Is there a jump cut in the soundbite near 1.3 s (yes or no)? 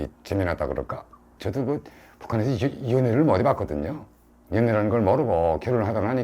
yes